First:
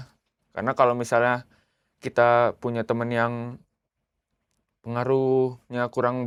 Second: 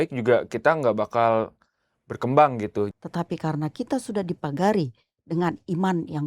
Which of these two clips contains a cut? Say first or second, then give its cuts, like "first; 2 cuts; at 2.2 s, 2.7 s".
second; 1 cut; at 2.9 s